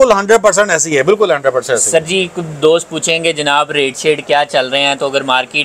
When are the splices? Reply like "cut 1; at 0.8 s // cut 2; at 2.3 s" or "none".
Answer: none